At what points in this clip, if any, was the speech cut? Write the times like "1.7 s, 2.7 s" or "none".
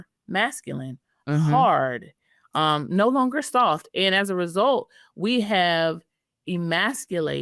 none